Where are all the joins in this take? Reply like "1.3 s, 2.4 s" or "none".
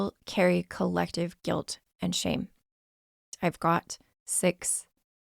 3.3 s